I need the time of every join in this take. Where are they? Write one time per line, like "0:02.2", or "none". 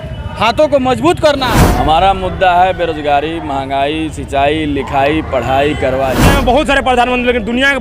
0:01.6
0:06.2

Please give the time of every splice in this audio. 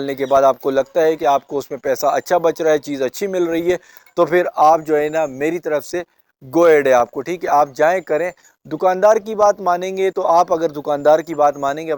none

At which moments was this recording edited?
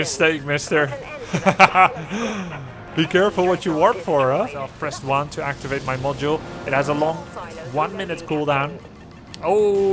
0:04.7

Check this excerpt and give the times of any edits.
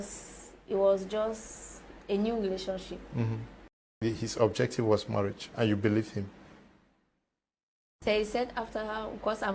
0:03.9

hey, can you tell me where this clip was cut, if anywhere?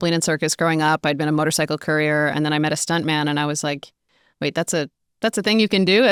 none

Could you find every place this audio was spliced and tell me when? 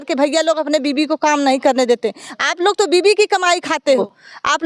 none

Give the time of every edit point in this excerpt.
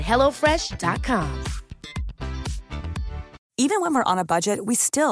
0:03.4

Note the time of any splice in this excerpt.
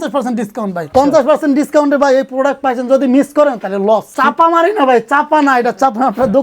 0:00.9
0:04.1

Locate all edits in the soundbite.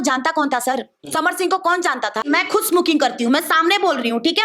0:02.2

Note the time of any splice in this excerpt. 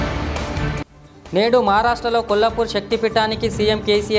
0:00.9

